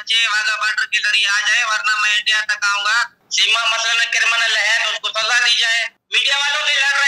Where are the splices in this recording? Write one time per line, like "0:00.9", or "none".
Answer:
0:03.2
0:06.1